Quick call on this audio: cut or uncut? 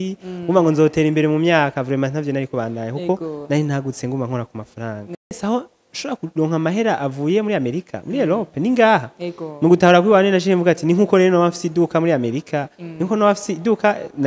cut